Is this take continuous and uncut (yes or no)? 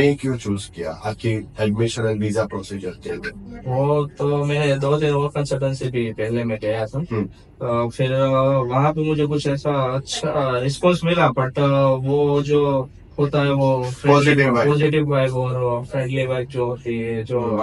yes